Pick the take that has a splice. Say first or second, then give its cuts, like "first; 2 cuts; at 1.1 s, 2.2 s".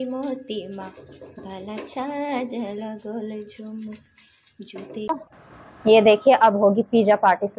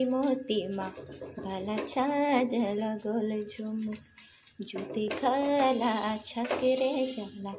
first; 1 cut; at 5.1 s